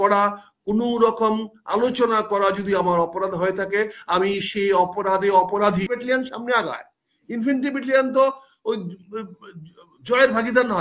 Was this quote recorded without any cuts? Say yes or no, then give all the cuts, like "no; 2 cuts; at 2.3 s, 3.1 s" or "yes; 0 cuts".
no; 1 cut; at 5.9 s